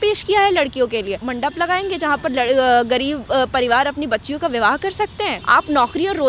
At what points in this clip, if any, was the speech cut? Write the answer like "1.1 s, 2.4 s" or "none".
1.3 s, 5.4 s